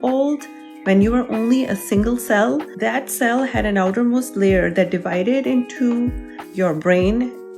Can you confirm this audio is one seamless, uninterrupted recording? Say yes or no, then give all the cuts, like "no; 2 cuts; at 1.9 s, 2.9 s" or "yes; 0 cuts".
yes; 0 cuts